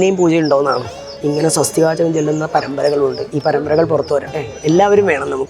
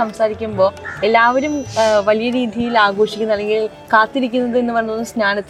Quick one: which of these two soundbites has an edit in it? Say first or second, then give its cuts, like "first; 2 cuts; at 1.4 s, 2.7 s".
first; 2 cuts; at 1.2 s, 4.5 s